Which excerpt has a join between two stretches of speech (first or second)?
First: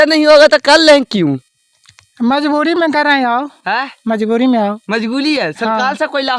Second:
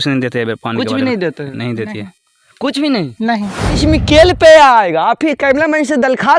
second